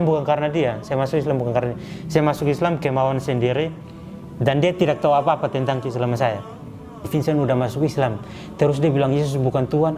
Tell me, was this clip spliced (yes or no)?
yes